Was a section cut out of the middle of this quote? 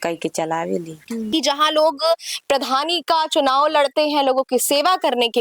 yes; 1 cut; at 1.3 s

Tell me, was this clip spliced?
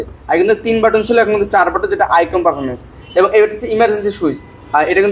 no; 0 cuts

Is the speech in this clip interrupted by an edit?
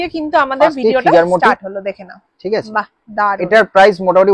no; 0 cuts

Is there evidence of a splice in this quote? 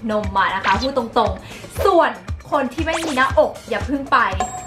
no; 0 cuts

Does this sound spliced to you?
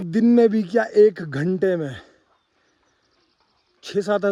no; 0 cuts

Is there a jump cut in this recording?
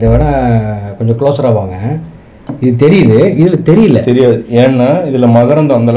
no; 0 cuts

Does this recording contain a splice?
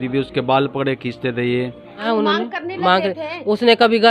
yes; 1 cut; at 2.0 s

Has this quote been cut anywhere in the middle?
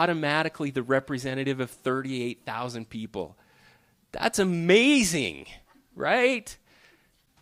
no; 0 cuts

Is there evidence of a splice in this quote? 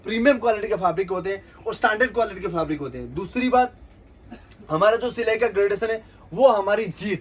no; 0 cuts

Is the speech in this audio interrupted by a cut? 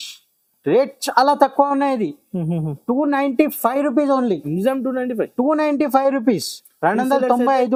no; 0 cuts

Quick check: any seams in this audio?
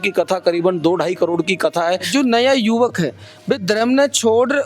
yes; 1 cut; at 2.1 s

